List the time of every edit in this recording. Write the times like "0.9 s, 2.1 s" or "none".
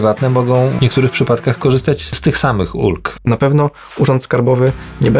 0.8 s, 2.2 s, 3.1 s